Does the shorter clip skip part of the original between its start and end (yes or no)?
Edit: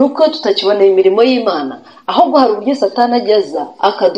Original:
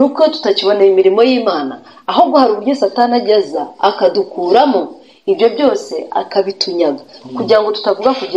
no